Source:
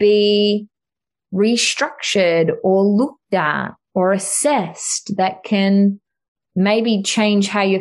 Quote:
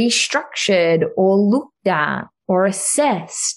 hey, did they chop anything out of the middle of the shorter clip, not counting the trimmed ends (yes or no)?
no